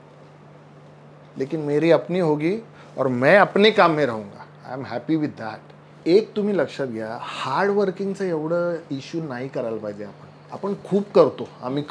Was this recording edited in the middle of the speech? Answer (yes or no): no